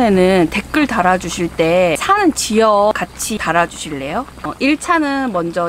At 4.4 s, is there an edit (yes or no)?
yes